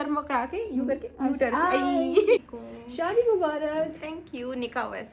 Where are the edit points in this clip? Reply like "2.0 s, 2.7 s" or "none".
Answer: 2.4 s